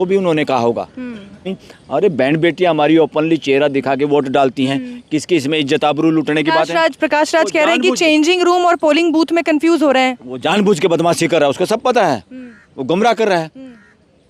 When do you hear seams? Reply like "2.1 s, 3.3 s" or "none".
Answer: 1.5 s